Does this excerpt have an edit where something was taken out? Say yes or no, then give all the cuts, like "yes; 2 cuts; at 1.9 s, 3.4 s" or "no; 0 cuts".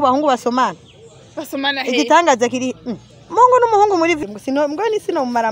yes; 1 cut; at 4.2 s